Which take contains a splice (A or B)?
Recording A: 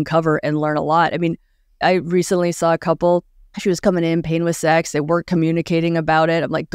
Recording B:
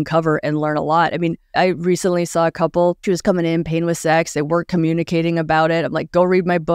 B